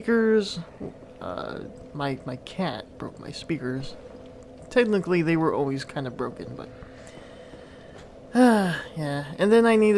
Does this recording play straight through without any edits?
yes; 0 cuts

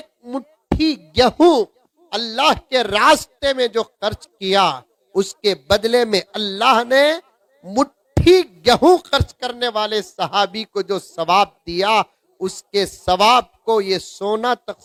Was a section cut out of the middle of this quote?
no; 0 cuts

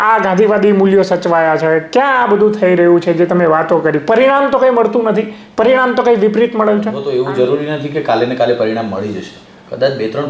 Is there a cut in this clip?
yes; 1 cut; at 7.0 s

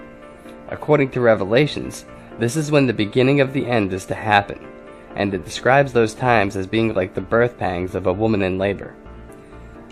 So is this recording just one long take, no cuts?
yes; 0 cuts

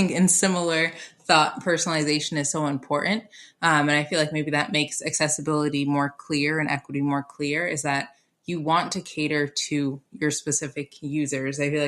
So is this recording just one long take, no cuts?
yes; 0 cuts

